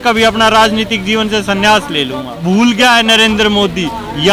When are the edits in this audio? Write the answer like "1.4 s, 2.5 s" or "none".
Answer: 2.3 s